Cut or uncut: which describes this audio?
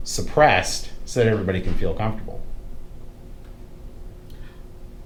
uncut